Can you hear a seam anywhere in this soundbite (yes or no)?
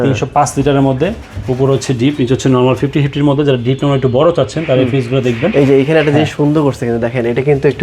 no